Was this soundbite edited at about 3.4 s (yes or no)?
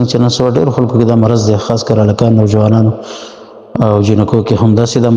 no